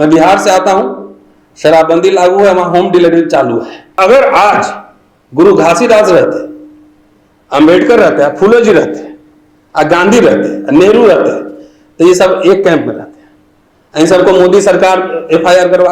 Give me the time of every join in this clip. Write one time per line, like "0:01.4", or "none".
0:04.0